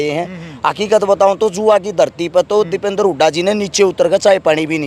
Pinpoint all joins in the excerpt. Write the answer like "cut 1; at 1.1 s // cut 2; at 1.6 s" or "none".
none